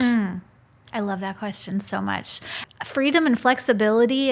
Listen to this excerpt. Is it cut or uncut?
cut